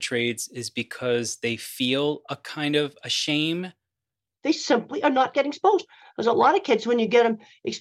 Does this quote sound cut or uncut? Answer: cut